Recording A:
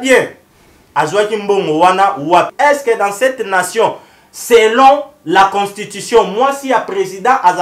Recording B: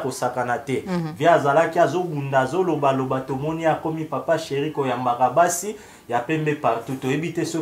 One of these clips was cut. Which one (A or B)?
A